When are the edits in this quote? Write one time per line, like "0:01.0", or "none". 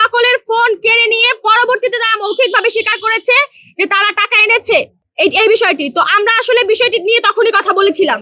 none